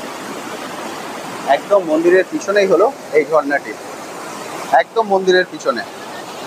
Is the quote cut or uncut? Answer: uncut